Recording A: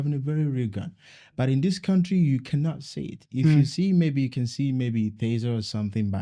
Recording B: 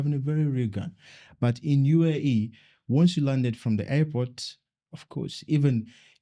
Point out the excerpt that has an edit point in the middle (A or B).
B